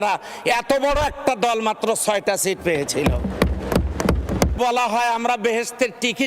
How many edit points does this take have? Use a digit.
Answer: 1